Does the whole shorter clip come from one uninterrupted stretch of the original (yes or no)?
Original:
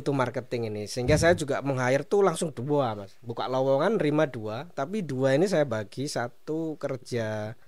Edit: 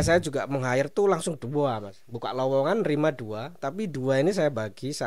yes